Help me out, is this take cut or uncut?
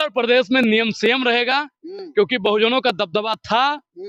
uncut